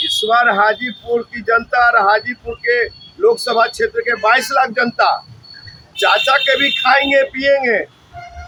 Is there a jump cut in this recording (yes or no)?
no